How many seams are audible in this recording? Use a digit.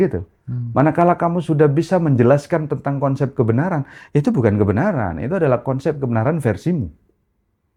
0